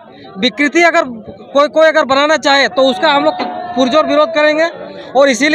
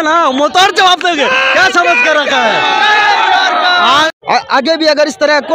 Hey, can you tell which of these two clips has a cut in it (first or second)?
second